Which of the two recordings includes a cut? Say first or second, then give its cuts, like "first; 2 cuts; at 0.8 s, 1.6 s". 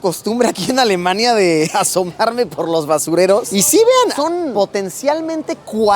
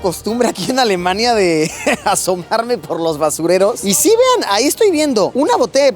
first; 2 cuts; at 1.7 s, 4.1 s